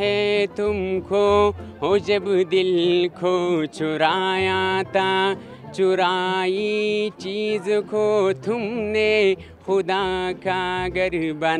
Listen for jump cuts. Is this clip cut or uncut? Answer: uncut